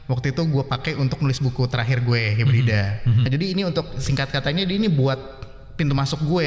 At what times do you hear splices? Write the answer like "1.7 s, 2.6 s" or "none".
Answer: 3.3 s